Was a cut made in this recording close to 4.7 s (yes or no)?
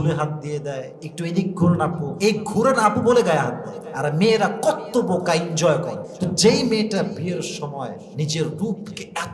no